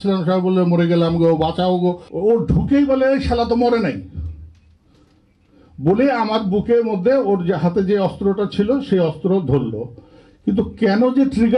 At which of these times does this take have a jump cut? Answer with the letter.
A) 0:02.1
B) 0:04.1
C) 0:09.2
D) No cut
A